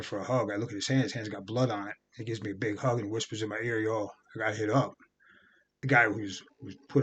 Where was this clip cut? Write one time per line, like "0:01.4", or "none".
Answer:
0:05.7